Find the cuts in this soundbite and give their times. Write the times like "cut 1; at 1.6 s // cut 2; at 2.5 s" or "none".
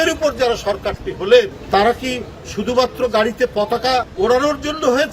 cut 1; at 1.6 s // cut 2; at 4.1 s